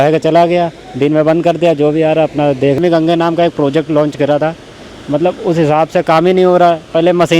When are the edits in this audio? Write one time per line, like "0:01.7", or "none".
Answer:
0:02.9